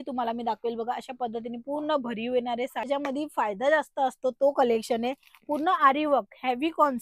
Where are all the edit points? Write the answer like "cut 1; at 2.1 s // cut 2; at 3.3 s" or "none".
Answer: cut 1; at 2.9 s